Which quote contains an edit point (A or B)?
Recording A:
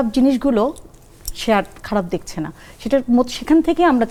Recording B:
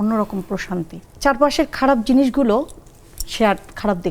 B